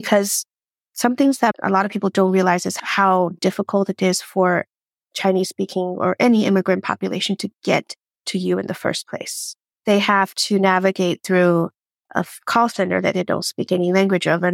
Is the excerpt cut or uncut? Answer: cut